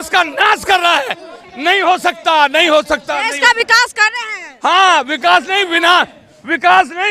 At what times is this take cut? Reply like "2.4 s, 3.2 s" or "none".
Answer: none